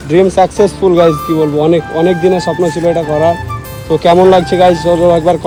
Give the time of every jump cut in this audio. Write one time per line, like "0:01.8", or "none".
none